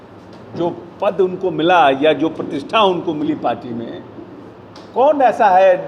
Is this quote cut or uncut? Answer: uncut